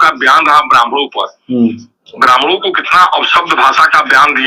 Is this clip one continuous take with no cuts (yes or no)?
yes